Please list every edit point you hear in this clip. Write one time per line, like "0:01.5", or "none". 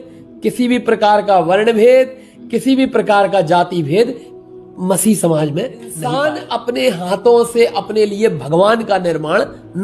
0:06.0